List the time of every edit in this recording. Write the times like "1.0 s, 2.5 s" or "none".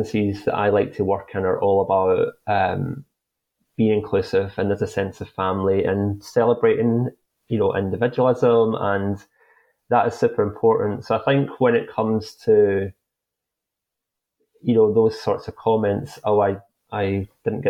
none